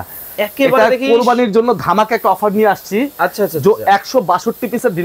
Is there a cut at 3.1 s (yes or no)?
no